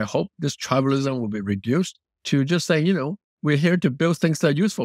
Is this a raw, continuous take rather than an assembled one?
yes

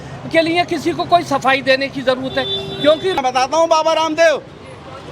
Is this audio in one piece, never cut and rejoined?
no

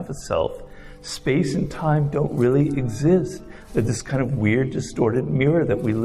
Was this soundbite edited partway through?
no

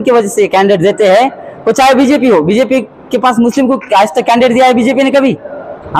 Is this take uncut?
yes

